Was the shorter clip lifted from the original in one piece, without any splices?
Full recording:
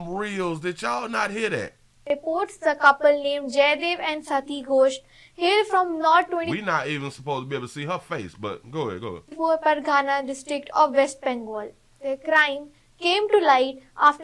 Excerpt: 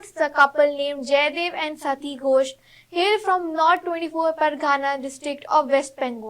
no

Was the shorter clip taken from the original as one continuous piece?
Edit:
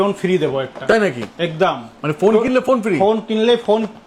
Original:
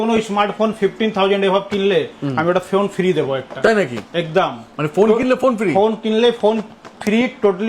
yes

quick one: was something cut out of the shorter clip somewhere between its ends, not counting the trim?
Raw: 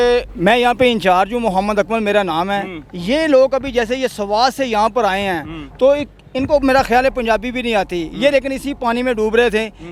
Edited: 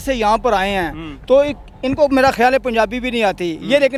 no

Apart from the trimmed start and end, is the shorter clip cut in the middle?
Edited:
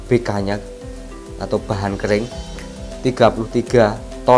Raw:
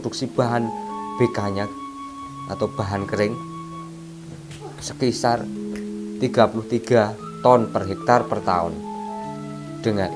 yes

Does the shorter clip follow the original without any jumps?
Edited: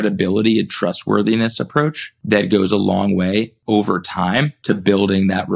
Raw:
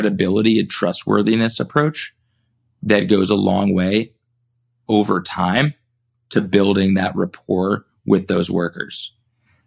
no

